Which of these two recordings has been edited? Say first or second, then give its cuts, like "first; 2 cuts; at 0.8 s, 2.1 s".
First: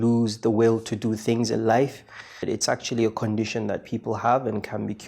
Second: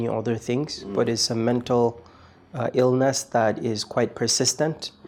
first; 1 cut; at 2.4 s